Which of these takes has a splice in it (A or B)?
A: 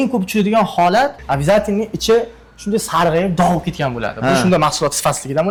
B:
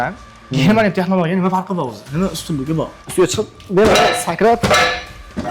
B